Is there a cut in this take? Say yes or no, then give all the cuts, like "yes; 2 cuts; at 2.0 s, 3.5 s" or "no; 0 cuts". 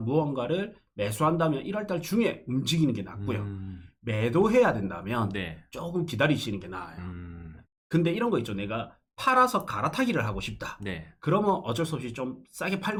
no; 0 cuts